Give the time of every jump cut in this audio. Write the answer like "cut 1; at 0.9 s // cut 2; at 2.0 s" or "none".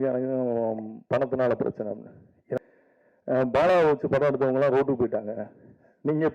cut 1; at 2.6 s

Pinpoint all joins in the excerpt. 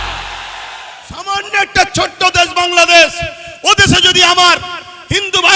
cut 1; at 1.2 s

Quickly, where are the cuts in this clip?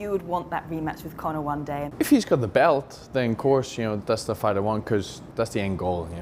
cut 1; at 1.9 s // cut 2; at 4.0 s // cut 3; at 5.2 s

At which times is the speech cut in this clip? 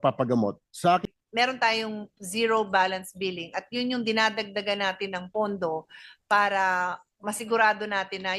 cut 1; at 1.0 s

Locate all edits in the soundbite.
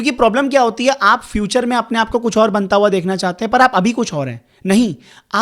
none

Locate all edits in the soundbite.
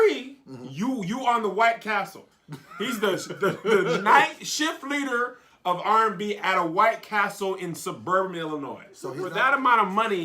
cut 1; at 9.2 s

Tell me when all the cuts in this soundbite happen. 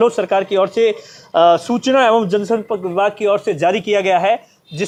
none

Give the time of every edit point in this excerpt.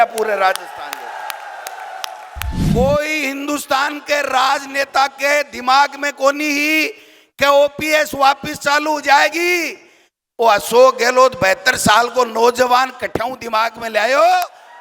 cut 1; at 2.7 s

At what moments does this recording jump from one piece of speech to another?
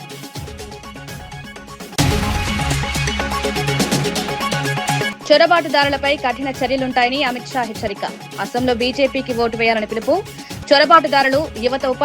cut 1; at 1.9 s // cut 2; at 5.1 s

